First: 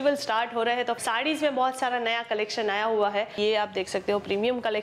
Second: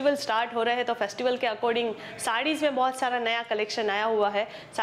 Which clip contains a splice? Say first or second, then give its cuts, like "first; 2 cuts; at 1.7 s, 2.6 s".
first; 2 cuts; at 1.0 s, 3.3 s